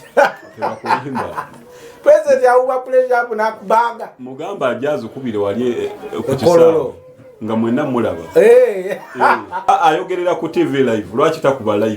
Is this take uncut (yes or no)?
no